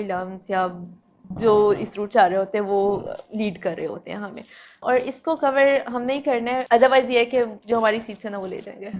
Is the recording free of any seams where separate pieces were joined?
no; 3 cuts; at 4.8 s, 6.6 s, 7.6 s

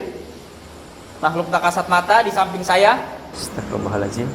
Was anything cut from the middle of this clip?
yes; 1 cut; at 3.3 s

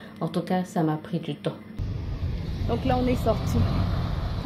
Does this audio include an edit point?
yes; 1 cut; at 1.7 s

